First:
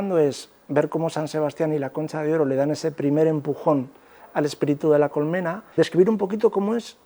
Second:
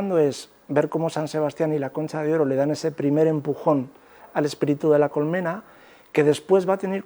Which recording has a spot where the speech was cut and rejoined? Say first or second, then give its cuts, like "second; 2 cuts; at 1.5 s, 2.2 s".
first; 1 cut; at 5.6 s